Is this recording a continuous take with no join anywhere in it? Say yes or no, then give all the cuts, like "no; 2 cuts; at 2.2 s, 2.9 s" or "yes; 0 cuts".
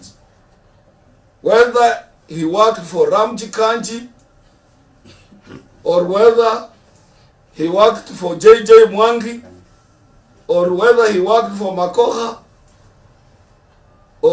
yes; 0 cuts